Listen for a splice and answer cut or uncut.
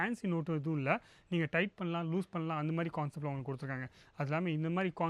uncut